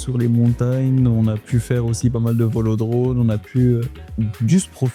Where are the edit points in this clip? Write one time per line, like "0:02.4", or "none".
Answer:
none